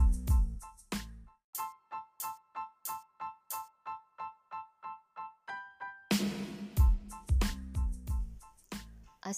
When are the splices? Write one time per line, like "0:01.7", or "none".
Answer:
none